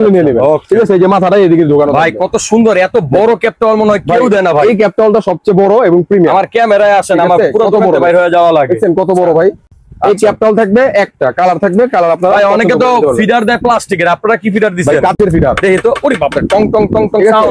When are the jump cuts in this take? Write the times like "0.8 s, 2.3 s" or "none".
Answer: none